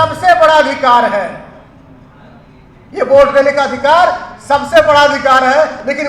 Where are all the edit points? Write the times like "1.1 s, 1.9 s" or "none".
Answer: none